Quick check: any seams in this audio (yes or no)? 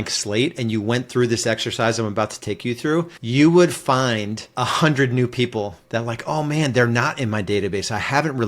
yes